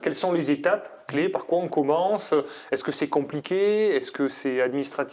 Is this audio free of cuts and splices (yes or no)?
yes